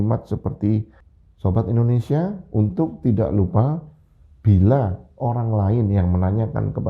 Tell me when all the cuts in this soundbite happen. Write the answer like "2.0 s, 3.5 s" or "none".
1.0 s